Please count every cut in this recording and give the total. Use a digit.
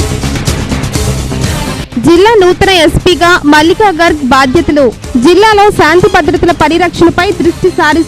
1